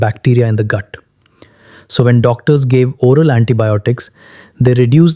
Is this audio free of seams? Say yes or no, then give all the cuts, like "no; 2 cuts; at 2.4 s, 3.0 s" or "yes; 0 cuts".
yes; 0 cuts